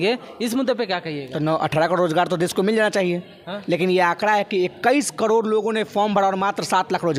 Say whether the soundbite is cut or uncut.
uncut